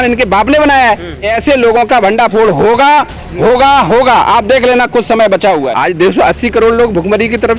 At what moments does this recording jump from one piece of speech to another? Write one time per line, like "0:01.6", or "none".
0:01.3
0:05.7

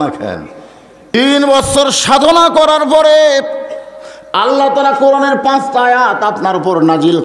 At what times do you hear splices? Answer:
0:01.0

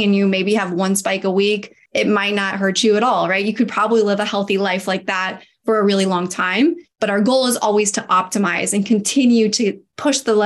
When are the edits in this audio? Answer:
0:01.8

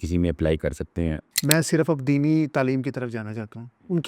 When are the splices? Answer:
0:01.3

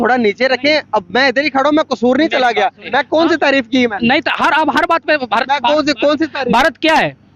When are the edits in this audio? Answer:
0:02.8

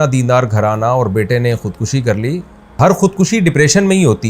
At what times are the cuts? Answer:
0:02.8

